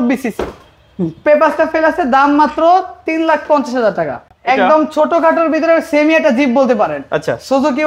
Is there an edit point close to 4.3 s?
yes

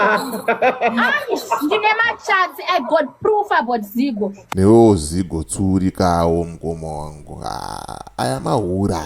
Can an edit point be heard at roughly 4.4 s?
yes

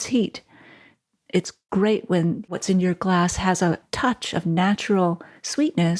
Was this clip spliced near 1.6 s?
yes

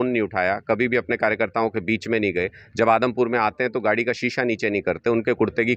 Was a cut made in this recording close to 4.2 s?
no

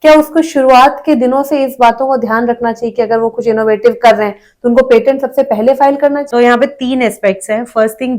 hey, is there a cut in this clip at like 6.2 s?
yes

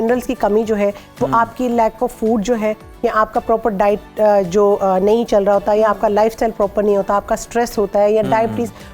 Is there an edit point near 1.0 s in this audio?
no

